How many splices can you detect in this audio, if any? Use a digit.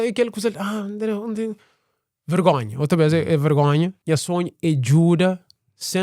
1